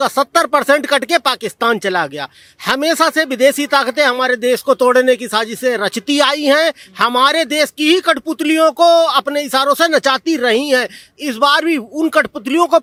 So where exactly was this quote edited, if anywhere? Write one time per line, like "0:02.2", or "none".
none

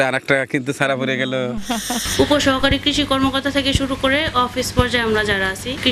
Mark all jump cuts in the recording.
0:02.0

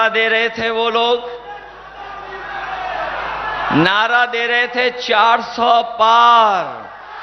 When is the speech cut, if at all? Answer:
none

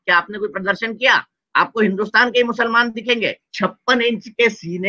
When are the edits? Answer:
0:03.4

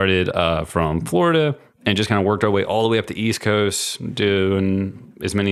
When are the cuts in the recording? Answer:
none

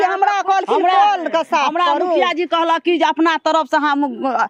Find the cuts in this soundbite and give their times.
none

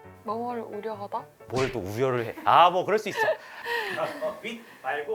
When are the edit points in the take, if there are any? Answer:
none

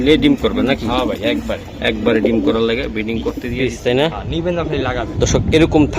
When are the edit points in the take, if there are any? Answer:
0:03.5

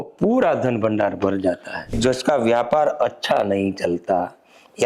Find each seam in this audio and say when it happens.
0:01.9

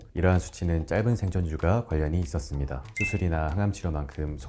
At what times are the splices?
0:02.9

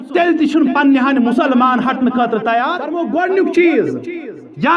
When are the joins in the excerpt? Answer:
0:03.0

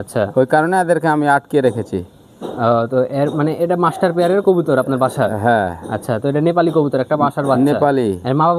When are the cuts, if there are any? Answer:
none

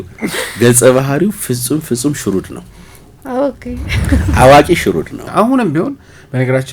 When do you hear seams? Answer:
0:05.2

